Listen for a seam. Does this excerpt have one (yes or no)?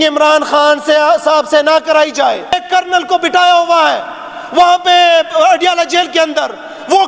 yes